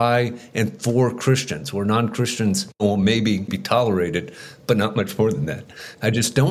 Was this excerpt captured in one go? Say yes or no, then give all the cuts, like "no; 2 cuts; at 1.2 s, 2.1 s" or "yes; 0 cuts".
no; 2 cuts; at 2.8 s, 3.6 s